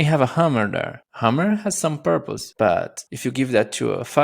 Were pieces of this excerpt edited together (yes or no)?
yes